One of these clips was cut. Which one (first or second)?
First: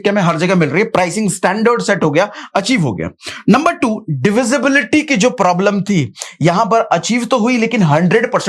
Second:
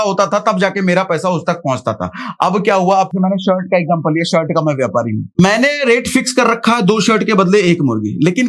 second